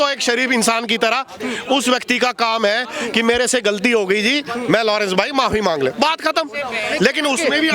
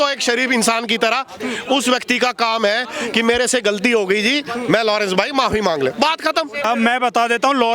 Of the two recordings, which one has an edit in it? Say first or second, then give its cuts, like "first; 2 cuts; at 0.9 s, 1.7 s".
second; 1 cut; at 6.7 s